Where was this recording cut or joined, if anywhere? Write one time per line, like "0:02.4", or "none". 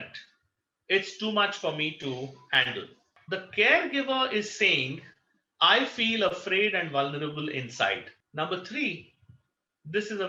0:03.1
0:08.2